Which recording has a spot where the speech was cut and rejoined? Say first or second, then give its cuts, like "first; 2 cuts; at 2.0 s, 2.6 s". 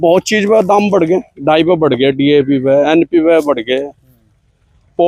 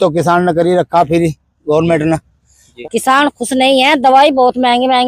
second; 1 cut; at 2.7 s